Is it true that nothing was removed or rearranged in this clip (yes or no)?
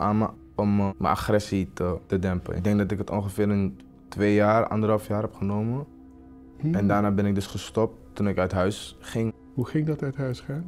no